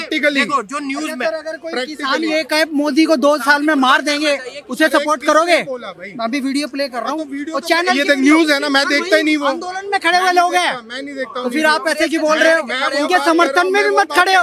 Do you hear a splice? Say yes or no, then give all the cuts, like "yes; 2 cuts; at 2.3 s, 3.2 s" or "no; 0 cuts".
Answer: no; 0 cuts